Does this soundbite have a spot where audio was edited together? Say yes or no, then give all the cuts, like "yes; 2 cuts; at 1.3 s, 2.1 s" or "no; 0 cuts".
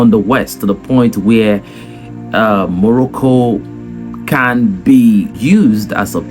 yes; 1 cut; at 5.4 s